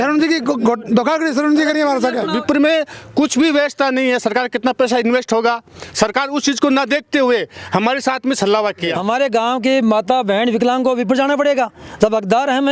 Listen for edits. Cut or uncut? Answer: cut